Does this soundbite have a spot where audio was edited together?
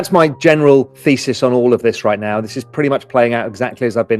yes; 1 cut; at 0.9 s

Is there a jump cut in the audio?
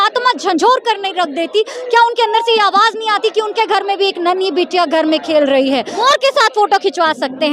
yes; 1 cut; at 5.9 s

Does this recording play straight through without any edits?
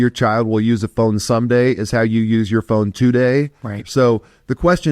no; 1 cut; at 3.8 s

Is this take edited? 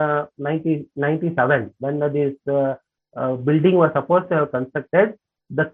no; 0 cuts

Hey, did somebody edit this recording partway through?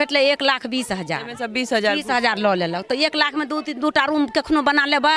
no; 0 cuts

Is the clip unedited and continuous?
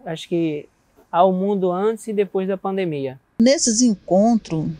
no; 1 cut; at 3.3 s

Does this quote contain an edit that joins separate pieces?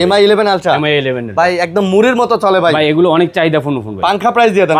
no; 0 cuts

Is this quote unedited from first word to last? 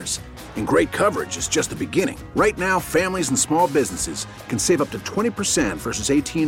yes; 0 cuts

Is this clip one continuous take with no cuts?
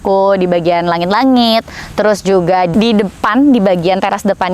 no; 1 cut; at 2.7 s

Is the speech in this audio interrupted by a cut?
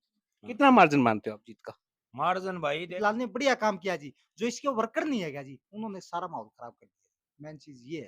yes; 1 cut; at 2.9 s

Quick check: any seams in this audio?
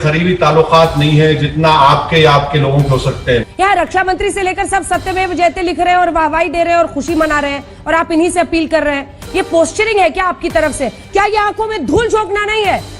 yes; 2 cuts; at 3.5 s, 11.0 s

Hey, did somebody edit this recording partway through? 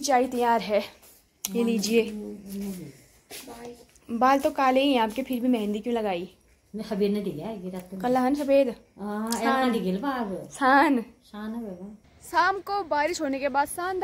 no; 0 cuts

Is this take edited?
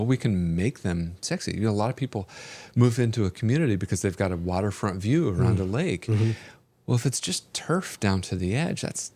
no; 0 cuts

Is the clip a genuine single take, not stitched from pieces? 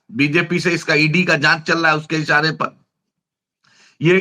yes; 0 cuts

